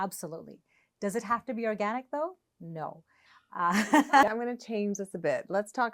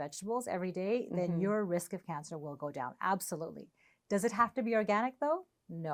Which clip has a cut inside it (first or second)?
first